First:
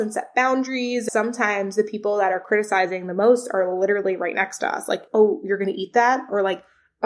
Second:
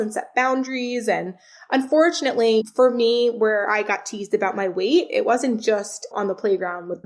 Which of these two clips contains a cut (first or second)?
first